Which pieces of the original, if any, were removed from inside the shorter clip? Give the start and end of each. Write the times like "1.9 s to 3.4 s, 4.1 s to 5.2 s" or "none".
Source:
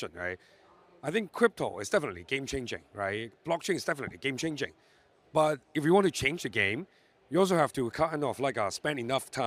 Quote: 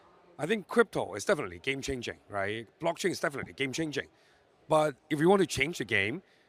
none